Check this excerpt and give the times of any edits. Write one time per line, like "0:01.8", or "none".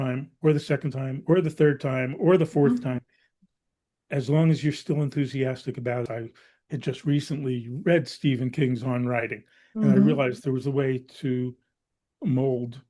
0:06.1